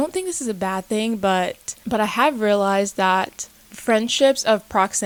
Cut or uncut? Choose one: uncut